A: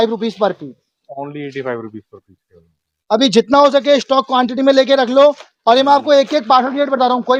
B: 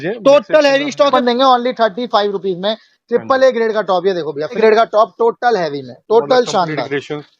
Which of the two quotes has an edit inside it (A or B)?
B